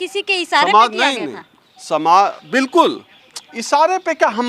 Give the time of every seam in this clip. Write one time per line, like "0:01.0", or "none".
none